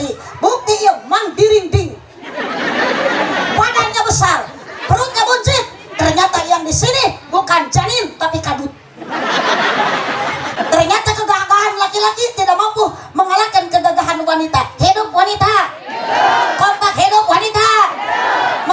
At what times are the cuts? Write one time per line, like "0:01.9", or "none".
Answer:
0:10.5